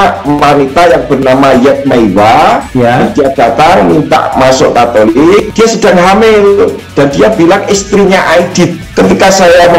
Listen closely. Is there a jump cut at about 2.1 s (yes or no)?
no